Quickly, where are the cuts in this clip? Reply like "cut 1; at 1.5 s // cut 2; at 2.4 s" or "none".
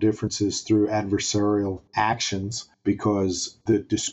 none